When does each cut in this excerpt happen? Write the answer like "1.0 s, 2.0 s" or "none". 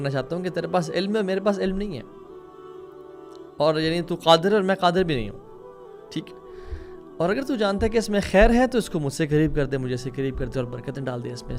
none